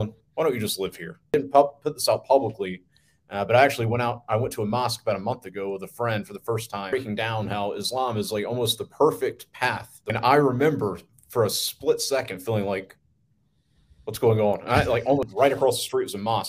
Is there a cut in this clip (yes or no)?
yes